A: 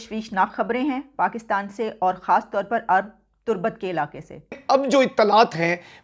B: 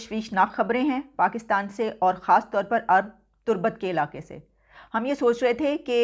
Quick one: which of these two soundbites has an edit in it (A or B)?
A